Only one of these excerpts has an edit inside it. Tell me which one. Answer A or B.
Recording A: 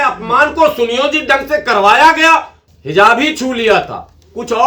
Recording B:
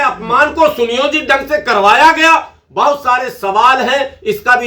A